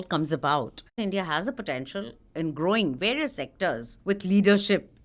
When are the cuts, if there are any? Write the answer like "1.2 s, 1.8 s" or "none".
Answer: 1.0 s, 3.9 s